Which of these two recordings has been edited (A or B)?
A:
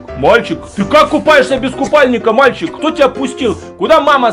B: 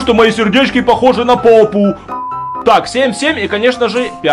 B